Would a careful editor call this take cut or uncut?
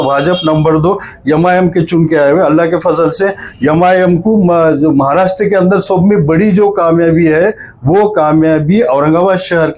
uncut